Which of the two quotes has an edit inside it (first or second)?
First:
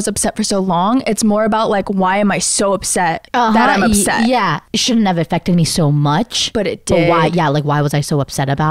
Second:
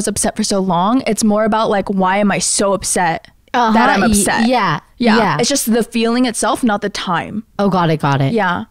first